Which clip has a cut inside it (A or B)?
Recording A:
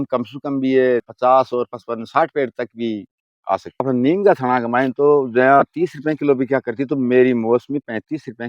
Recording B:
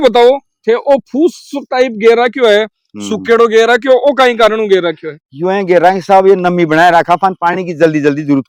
A